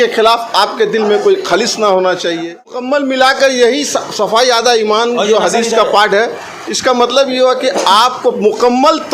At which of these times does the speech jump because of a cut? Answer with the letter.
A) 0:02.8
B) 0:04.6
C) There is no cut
A